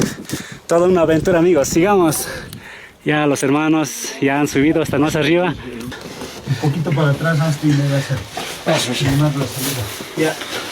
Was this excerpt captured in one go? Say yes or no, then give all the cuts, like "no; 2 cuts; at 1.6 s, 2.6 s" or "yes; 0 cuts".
no; 1 cut; at 5.9 s